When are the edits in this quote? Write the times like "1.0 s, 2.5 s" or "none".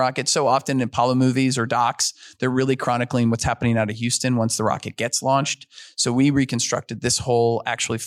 none